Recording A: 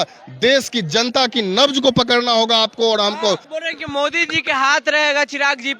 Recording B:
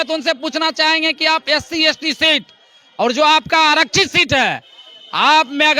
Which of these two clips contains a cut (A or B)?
A